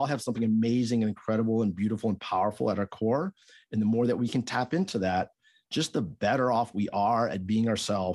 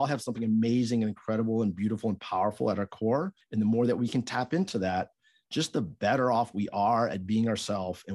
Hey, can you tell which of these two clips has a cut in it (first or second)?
second